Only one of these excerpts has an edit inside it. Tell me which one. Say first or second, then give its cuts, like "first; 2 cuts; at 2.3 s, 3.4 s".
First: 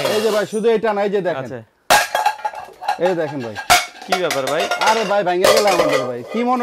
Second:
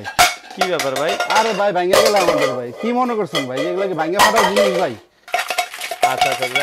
second; 1 cut; at 5.3 s